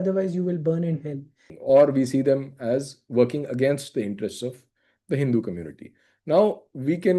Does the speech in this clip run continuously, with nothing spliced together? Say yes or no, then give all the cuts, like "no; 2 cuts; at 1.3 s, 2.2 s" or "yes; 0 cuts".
no; 1 cut; at 1.4 s